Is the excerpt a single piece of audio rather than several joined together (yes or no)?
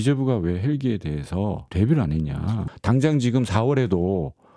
no